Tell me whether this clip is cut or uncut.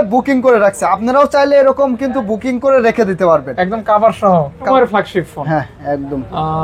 cut